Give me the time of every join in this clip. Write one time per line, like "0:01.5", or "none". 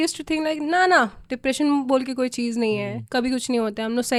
none